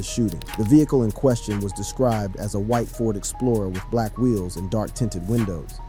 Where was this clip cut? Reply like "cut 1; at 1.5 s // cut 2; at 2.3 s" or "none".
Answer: none

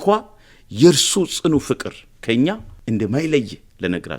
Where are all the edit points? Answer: cut 1; at 2.7 s

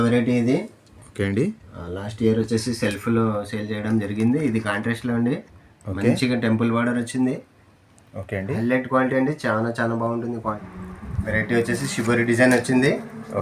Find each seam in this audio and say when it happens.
cut 1; at 10.5 s

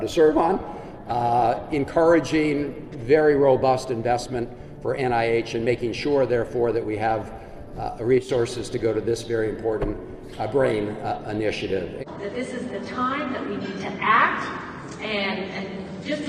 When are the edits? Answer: cut 1; at 12.0 s

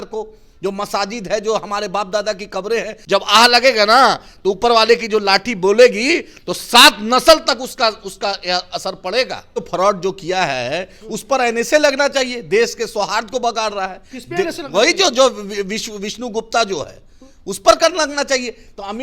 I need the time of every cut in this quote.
cut 1; at 3.0 s // cut 2; at 9.5 s

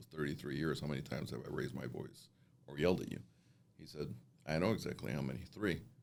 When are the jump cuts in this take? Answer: none

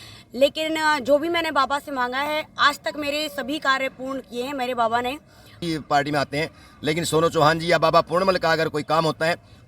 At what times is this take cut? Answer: cut 1; at 5.5 s

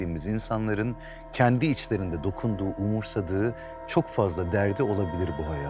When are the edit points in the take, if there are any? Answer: none

